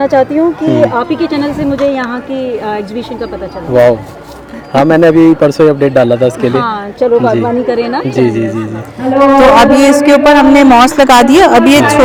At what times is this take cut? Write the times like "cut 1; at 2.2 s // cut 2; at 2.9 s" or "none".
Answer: none